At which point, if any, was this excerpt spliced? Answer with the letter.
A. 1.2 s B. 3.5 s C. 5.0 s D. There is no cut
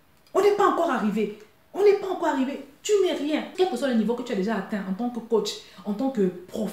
B